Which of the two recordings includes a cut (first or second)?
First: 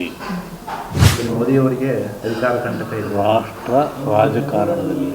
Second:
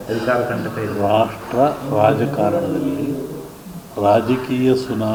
first